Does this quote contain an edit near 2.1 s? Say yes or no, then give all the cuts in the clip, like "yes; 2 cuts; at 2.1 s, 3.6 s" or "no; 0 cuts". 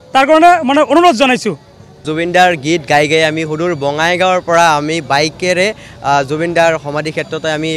yes; 1 cut; at 2.1 s